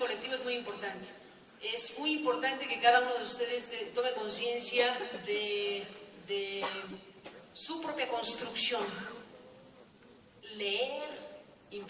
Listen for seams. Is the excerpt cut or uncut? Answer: uncut